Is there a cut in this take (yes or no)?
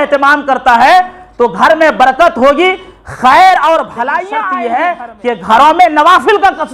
yes